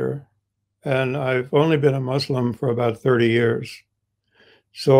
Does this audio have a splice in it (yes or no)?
no